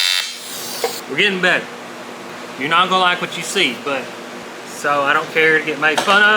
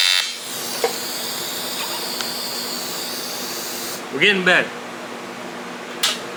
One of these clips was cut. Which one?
first; 3 cuts; at 1.0 s, 2.3 s, 4.4 s

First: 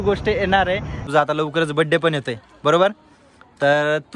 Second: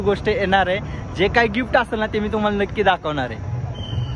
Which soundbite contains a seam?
first; 1 cut; at 1.0 s

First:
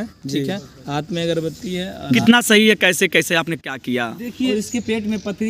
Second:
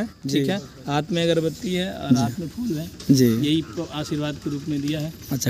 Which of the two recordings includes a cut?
first; 2 cuts; at 2.2 s, 4.5 s

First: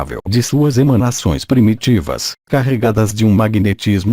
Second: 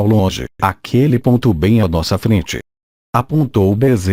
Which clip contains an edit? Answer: first; 1 cut; at 1.2 s

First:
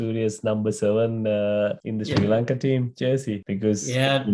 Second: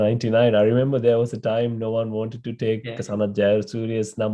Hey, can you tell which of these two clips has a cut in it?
first; 2 cuts; at 1.8 s, 3.4 s

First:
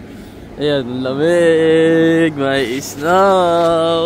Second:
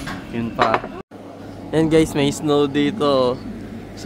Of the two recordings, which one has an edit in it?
second; 1 cut; at 1.0 s

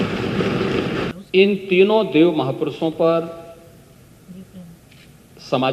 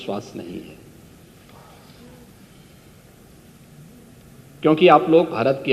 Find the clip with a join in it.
first; 1 cut; at 1.1 s

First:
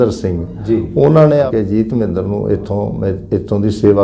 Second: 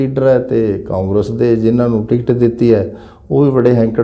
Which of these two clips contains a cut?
first; 1 cut; at 1.5 s

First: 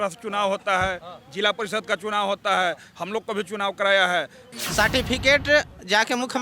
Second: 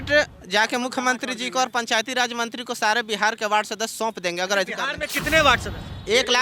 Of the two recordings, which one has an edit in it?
first; 1 cut; at 4.4 s

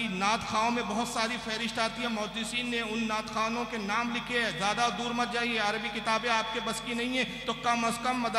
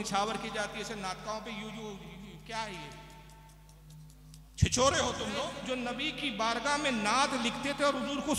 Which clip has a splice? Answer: second; 1 cut; at 5.6 s

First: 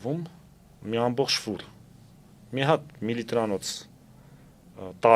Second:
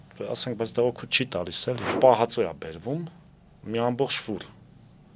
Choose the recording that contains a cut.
second; 1 cut; at 1.9 s

